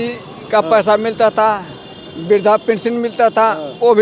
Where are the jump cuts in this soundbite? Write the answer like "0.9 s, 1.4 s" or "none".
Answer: none